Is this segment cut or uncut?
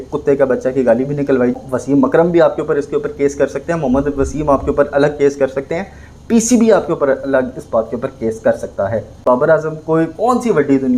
cut